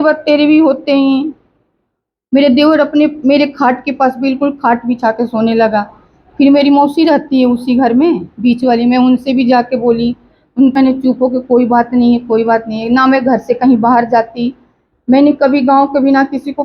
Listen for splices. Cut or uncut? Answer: cut